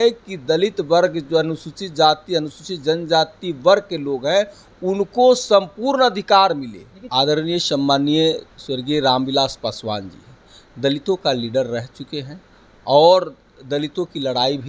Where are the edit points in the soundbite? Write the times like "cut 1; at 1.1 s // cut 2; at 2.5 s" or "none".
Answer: cut 1; at 7.0 s